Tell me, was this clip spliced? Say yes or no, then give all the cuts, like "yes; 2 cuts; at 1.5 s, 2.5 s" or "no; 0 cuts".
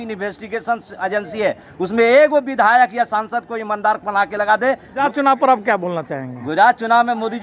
yes; 1 cut; at 5.0 s